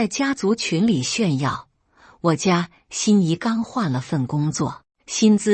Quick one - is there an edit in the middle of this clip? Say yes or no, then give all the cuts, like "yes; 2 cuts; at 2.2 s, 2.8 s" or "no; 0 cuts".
no; 0 cuts